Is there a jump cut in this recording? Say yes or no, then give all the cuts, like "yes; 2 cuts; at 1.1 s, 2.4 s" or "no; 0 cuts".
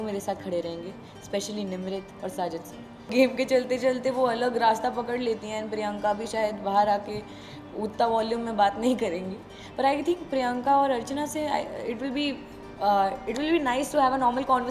yes; 1 cut; at 3.1 s